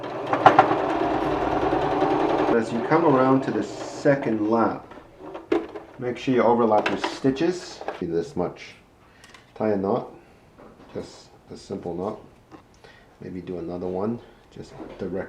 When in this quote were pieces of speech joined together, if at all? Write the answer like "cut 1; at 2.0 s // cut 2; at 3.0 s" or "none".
cut 1; at 2.5 s // cut 2; at 8.0 s

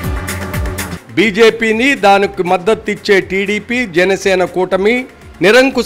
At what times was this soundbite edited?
cut 1; at 0.9 s

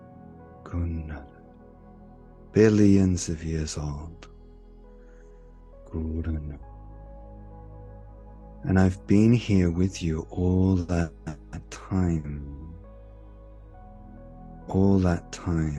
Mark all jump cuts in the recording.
none

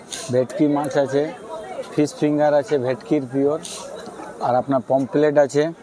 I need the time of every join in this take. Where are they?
none

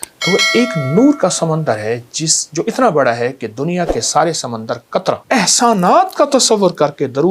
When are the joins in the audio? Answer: cut 1; at 5.2 s

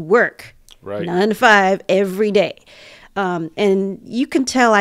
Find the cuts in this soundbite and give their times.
none

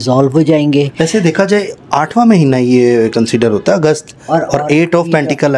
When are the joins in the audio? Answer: none

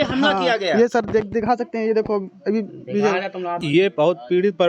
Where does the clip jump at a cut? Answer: cut 1; at 3.6 s

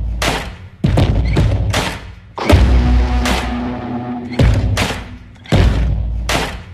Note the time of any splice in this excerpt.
none

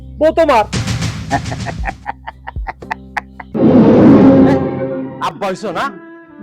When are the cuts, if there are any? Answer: cut 1; at 3.5 s // cut 2; at 5.1 s

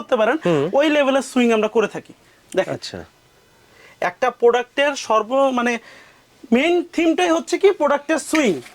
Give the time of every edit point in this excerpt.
none

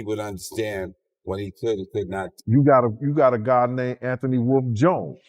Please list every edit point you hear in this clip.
cut 1; at 2.3 s

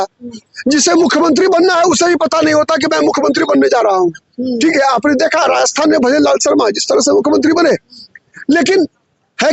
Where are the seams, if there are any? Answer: none

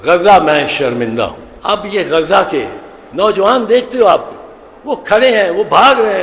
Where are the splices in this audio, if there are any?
cut 1; at 1.5 s

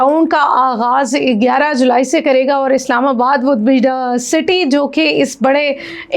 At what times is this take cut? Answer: none

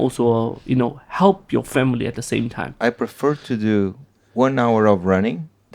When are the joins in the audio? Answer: cut 1; at 2.7 s

